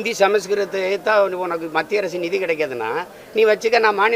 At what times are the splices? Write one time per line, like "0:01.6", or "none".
none